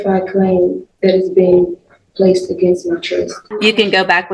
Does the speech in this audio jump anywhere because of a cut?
yes; 1 cut; at 3.4 s

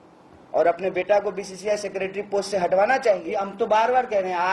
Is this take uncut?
no; 1 cut; at 3.5 s

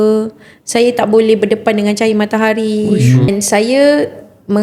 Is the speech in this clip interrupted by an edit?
yes; 1 cut; at 3.3 s

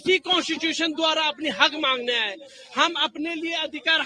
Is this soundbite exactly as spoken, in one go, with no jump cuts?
yes; 0 cuts

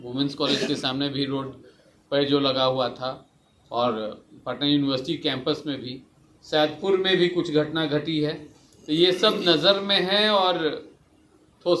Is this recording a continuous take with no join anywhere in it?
yes; 0 cuts

